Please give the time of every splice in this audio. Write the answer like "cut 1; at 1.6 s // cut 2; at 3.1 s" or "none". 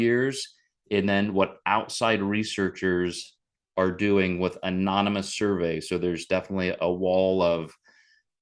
none